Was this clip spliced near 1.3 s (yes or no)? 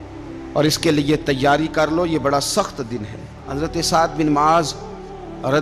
no